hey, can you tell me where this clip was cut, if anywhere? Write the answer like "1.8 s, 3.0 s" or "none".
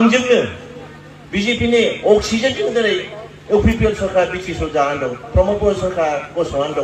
none